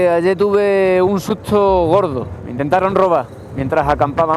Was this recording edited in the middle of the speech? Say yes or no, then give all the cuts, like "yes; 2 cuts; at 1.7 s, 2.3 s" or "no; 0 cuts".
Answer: no; 0 cuts